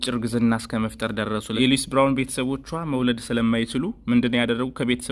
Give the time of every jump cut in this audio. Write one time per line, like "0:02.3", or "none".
0:01.5